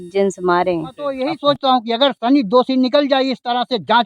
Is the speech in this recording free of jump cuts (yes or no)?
no